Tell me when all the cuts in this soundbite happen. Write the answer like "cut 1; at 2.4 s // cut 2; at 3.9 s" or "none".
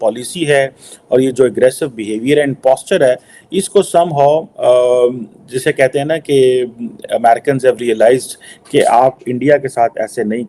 none